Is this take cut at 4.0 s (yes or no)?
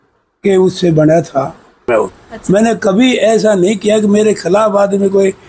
no